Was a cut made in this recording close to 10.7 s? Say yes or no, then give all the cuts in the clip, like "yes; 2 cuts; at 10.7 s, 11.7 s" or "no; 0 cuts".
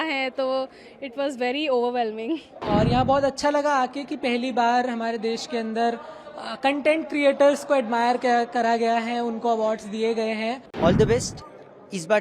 yes; 2 cuts; at 2.5 s, 10.7 s